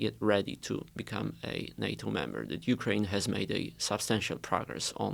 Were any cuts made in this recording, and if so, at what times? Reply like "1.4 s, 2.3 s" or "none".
none